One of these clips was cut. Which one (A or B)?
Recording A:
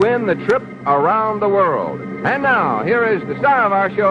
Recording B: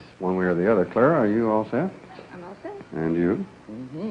A